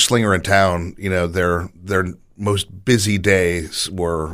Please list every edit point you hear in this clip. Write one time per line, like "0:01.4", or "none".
none